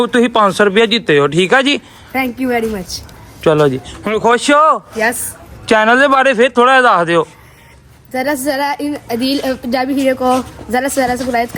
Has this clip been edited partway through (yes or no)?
no